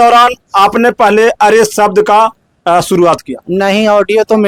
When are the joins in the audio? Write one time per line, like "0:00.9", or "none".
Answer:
none